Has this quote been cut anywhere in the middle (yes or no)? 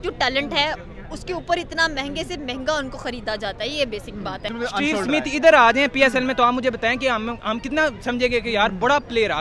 yes